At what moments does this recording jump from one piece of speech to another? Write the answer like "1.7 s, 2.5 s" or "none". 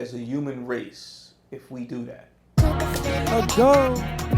2.4 s